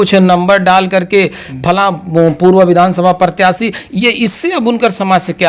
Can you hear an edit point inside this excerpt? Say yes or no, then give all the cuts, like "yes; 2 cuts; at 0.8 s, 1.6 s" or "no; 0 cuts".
no; 0 cuts